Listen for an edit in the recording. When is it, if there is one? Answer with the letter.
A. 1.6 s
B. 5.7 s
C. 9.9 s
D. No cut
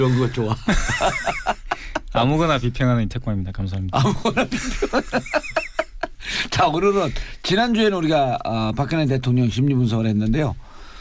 A